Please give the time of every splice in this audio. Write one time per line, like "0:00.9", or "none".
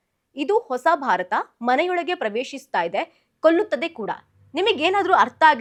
none